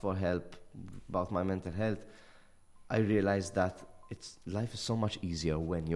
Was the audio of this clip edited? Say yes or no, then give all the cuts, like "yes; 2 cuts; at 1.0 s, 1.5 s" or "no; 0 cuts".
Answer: no; 0 cuts